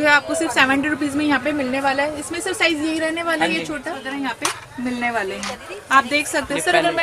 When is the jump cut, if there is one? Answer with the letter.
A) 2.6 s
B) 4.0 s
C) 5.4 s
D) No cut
B